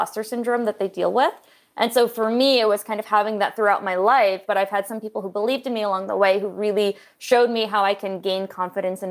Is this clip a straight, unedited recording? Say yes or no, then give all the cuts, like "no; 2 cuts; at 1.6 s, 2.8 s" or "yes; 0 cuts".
no; 1 cut; at 4.4 s